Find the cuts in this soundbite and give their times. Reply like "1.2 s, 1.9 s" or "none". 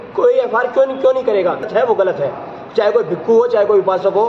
1.6 s